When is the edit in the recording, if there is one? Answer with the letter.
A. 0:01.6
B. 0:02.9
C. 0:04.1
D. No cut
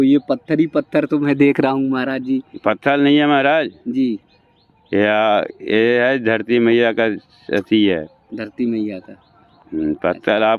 D